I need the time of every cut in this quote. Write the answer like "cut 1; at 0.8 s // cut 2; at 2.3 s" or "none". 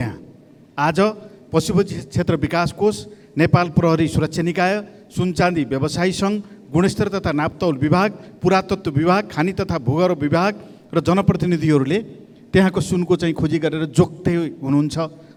none